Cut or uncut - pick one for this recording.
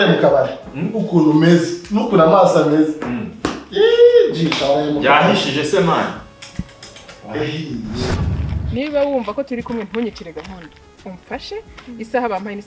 cut